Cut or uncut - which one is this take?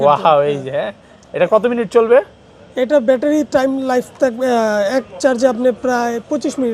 uncut